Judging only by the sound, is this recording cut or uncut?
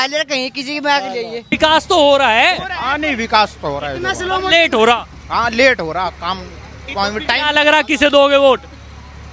cut